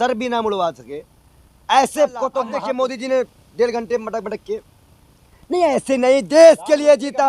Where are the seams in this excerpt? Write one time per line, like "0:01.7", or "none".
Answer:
0:02.5